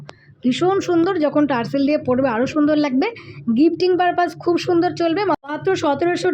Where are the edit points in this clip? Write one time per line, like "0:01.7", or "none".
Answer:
0:05.4